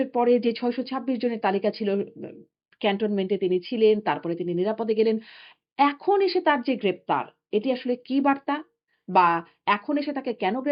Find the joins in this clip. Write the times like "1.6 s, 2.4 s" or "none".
none